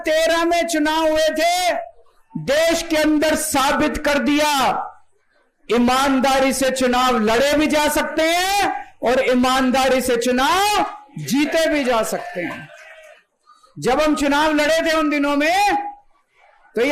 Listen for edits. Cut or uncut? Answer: uncut